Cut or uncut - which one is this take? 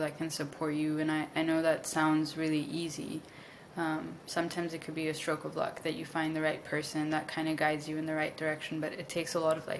uncut